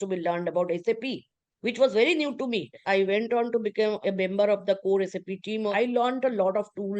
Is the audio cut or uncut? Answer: cut